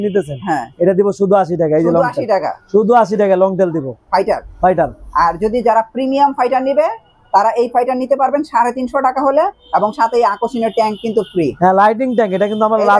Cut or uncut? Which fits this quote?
uncut